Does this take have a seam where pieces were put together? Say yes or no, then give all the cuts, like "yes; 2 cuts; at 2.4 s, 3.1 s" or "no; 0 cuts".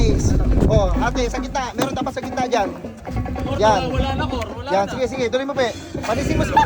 no; 0 cuts